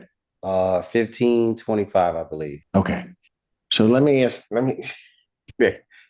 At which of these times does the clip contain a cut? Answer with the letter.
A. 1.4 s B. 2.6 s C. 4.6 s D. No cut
B